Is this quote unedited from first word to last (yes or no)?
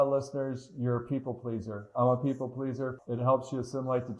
no